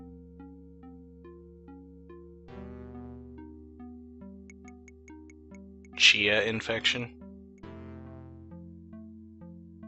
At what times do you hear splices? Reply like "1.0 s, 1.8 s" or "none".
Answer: 6.7 s

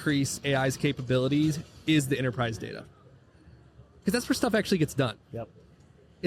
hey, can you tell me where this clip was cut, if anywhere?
none

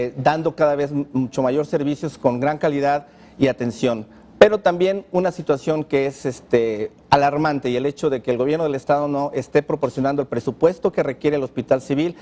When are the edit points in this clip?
none

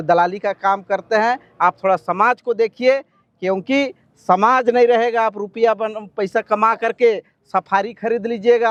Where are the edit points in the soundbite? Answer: none

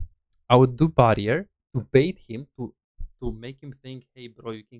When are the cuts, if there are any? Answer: none

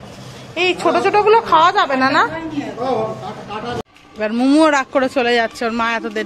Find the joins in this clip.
3.8 s

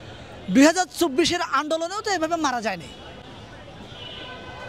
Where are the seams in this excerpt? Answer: none

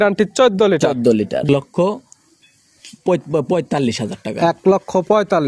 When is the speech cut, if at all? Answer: 1.4 s

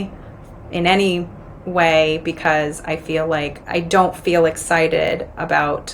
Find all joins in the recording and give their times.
3.6 s

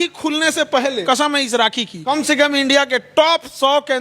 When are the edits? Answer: 1.0 s, 1.9 s

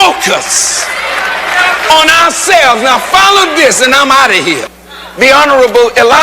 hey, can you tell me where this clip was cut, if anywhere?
4.7 s

